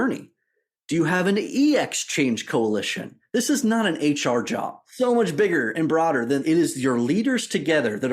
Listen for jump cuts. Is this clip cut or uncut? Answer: cut